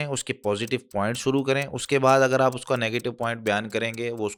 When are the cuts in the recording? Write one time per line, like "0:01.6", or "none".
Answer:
none